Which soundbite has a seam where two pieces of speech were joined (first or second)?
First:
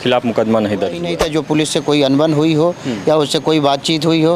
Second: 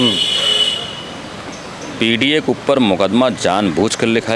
first